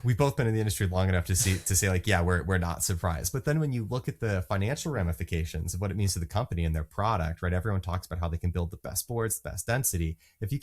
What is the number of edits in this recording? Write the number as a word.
zero